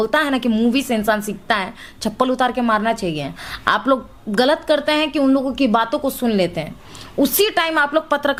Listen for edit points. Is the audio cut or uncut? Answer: uncut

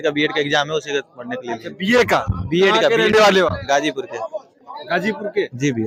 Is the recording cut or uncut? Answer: uncut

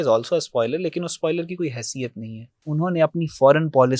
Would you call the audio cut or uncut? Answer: cut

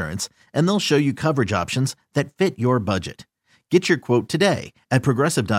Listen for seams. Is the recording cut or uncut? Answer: uncut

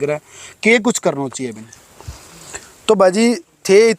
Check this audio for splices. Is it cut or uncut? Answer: cut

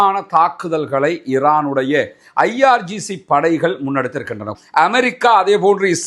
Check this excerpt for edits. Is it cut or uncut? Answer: cut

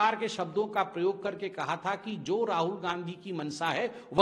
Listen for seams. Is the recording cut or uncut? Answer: uncut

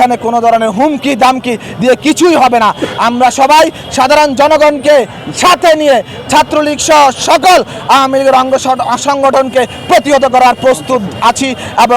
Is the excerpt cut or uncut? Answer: uncut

